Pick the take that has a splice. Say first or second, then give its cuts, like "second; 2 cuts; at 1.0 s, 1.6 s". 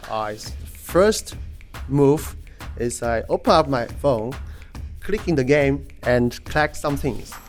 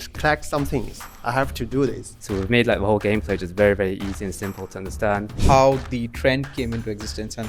second; 2 cuts; at 2.1 s, 5.4 s